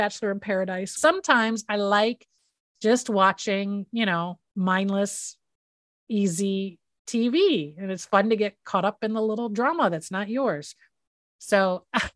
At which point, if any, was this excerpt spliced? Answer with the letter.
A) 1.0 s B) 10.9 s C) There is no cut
A